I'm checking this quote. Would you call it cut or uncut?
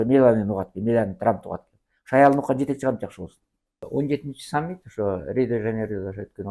cut